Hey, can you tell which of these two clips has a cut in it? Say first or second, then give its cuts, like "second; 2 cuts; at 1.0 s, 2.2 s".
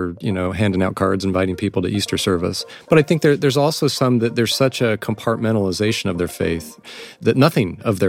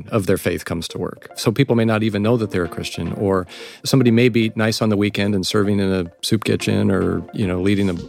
first; 2 cuts; at 2.6 s, 6.8 s